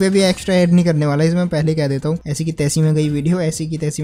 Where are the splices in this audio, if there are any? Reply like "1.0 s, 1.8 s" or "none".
2.3 s